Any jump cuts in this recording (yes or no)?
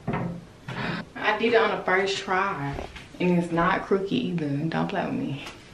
yes